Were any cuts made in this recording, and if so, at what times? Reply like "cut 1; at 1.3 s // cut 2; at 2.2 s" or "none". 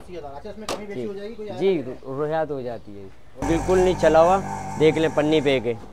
cut 1; at 3.5 s